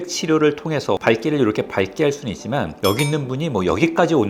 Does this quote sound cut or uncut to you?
cut